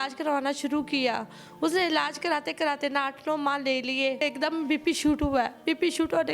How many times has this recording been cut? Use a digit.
1